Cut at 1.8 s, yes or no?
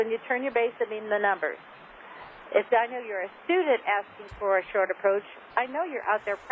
yes